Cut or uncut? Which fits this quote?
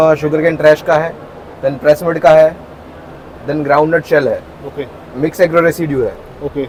uncut